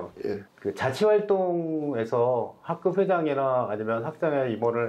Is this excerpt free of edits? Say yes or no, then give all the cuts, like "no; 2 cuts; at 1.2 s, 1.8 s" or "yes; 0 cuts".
yes; 0 cuts